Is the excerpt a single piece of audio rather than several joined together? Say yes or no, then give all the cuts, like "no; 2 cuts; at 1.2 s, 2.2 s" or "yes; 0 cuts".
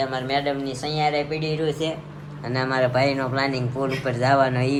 yes; 0 cuts